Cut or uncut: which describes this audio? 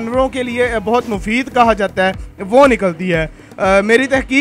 uncut